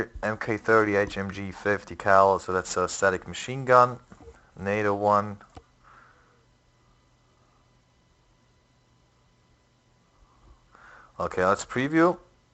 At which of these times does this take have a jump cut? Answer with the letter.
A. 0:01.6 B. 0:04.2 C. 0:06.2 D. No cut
D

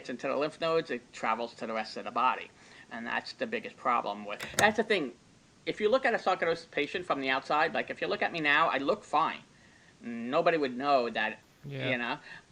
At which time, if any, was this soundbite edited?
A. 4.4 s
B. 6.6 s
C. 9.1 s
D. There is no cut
A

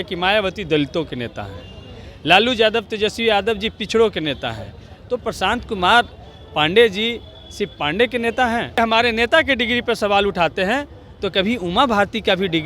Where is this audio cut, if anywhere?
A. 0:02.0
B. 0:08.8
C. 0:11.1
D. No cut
B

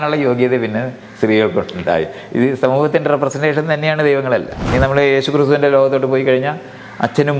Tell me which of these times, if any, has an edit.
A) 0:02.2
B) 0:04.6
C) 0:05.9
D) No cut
B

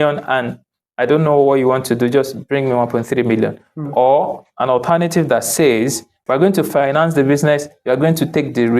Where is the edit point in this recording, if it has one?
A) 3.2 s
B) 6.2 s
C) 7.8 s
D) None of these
B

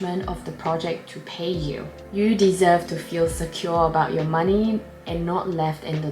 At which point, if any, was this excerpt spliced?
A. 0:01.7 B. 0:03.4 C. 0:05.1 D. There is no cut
D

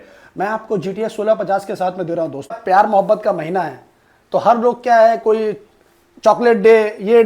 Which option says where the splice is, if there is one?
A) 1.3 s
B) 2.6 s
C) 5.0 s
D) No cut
B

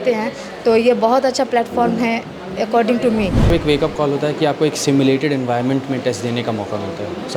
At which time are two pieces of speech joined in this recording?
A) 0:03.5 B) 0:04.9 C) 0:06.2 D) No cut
A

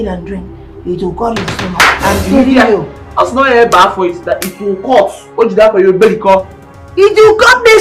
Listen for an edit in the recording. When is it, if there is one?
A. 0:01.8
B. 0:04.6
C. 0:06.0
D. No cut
A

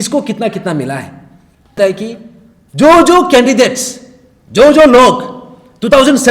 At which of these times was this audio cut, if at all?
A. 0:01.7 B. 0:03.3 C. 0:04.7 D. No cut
A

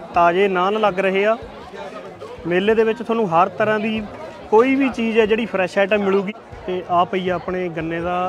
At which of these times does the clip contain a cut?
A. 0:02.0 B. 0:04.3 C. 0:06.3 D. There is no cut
C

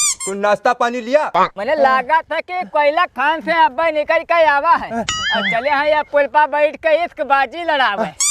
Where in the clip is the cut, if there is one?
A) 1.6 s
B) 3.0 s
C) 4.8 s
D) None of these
A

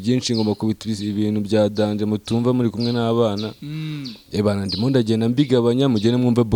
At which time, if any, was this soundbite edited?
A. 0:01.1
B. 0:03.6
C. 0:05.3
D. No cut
D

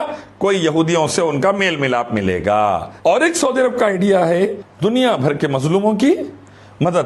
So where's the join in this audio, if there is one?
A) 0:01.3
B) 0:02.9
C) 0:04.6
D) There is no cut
B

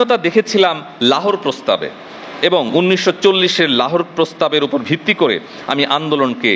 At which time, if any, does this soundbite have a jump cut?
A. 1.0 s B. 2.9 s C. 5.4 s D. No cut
D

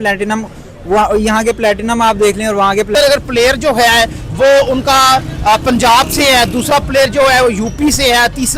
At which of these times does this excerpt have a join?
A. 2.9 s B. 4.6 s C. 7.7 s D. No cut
A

